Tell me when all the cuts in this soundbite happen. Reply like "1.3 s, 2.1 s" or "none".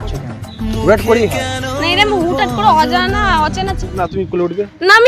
3.8 s